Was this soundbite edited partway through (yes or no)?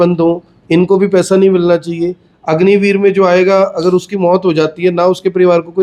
no